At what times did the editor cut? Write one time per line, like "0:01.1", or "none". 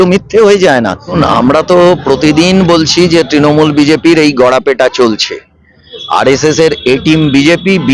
0:01.2